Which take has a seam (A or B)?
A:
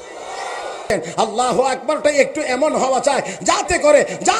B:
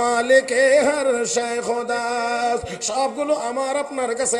A